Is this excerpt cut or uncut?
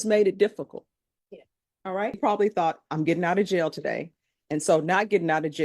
cut